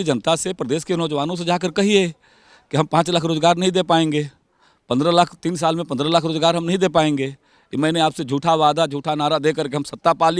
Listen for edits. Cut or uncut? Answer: uncut